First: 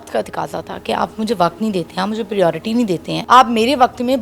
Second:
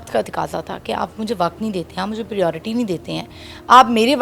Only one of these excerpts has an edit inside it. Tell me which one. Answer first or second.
first